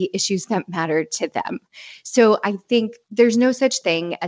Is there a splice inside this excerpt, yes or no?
no